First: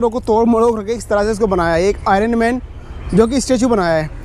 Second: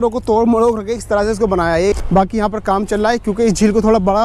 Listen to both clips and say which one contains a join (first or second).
second